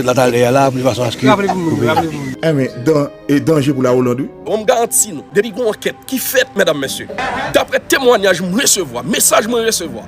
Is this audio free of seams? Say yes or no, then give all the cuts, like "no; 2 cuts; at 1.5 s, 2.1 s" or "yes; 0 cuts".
no; 2 cuts; at 4.4 s, 5.2 s